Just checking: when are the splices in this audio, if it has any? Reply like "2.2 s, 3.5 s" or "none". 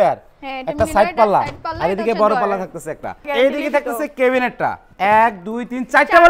3.3 s, 4.8 s